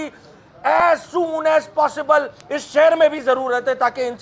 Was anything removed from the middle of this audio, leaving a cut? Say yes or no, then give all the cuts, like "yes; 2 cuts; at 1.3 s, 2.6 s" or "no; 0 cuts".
no; 0 cuts